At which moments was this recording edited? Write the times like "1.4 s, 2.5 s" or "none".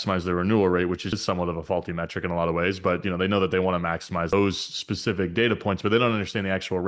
1.2 s, 4.3 s